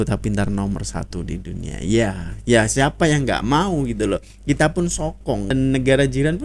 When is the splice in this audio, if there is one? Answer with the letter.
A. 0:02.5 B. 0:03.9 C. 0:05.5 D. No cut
C